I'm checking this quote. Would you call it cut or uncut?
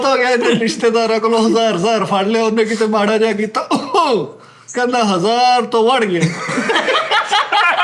uncut